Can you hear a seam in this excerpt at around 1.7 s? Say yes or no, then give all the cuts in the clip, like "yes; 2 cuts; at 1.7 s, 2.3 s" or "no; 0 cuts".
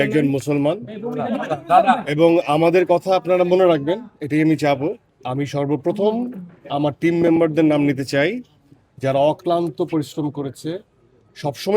no; 1 cut; at 5.1 s